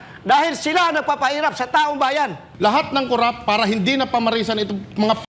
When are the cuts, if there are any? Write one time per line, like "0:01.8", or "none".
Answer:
0:02.4